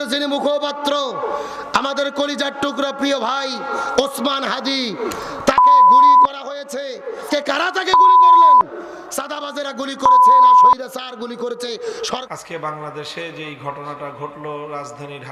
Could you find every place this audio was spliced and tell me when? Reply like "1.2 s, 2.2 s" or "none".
7.2 s, 12.2 s